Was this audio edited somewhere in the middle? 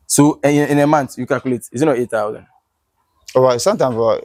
no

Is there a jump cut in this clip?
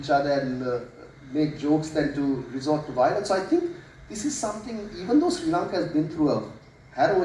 no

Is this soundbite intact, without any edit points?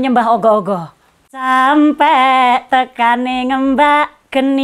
no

